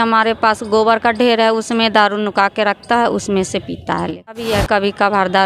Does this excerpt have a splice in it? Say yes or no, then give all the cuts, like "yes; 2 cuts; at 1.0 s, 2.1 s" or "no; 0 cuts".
yes; 1 cut; at 4.4 s